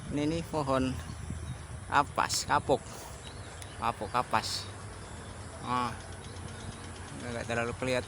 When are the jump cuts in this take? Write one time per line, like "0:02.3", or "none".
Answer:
none

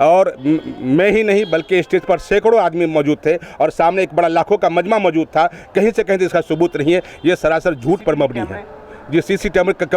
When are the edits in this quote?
none

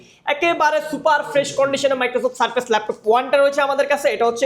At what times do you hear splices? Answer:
none

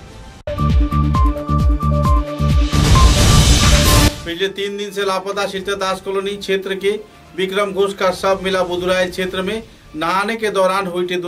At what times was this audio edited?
0:04.1

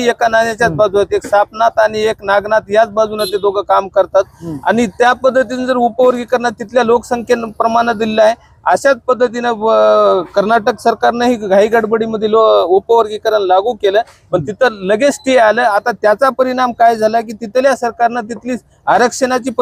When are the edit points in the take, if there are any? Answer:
none

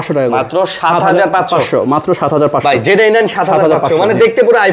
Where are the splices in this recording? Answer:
none

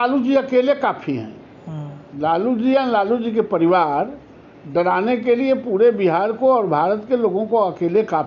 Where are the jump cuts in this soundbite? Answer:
none

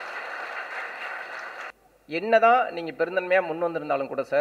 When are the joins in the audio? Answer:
0:01.7

